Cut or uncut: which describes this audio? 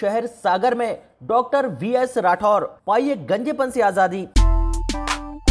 cut